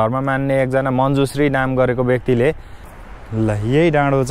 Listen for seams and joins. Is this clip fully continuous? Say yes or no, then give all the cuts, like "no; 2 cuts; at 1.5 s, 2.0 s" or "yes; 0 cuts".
no; 1 cut; at 2.7 s